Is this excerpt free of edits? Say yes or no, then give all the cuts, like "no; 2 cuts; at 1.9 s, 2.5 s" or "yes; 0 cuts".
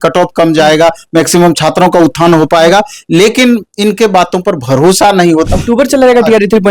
no; 1 cut; at 5.5 s